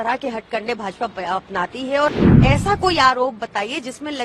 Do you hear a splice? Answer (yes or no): yes